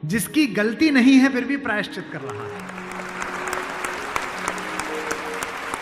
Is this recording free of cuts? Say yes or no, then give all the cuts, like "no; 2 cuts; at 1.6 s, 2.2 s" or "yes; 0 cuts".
yes; 0 cuts